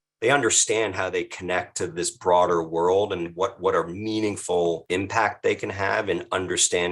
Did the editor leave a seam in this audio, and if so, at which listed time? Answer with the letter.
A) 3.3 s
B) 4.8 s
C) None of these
B